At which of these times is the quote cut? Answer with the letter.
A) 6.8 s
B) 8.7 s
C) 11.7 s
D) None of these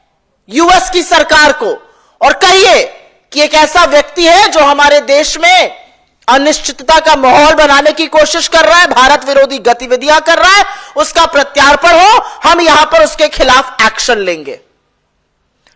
D